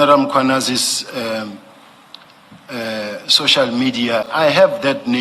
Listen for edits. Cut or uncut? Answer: cut